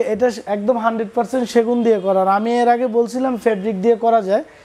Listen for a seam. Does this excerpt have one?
no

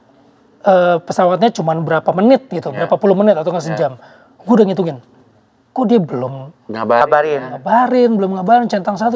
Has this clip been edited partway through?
no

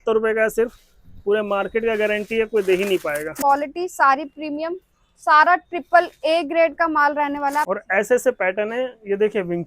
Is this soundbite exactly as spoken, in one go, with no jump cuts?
no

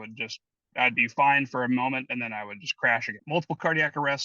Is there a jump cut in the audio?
yes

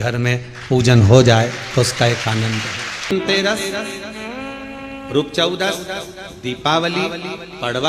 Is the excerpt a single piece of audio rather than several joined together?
no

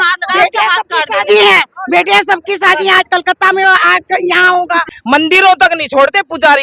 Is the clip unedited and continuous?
no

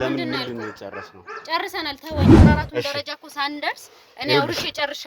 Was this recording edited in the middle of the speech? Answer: yes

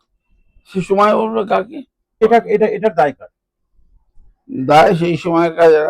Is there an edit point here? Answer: yes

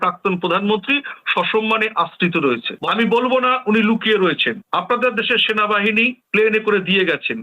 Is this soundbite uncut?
yes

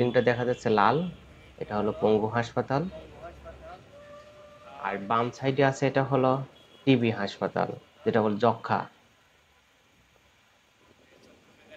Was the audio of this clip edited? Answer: no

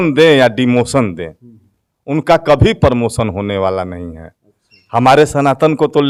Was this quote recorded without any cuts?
yes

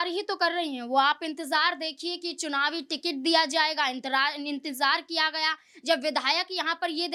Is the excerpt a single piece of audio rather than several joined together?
yes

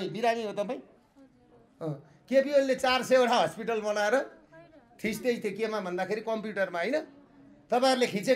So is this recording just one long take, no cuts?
yes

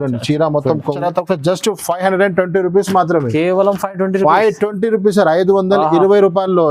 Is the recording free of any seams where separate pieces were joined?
no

